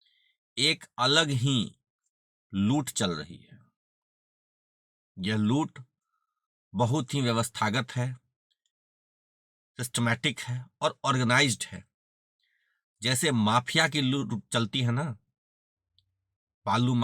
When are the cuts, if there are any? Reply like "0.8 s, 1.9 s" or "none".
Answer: none